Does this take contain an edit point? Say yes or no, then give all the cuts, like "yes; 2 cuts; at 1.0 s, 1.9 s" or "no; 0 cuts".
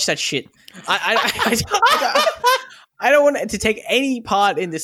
no; 0 cuts